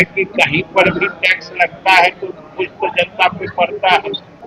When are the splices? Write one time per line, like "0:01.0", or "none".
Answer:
none